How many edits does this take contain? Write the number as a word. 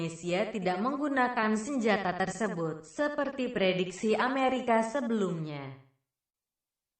one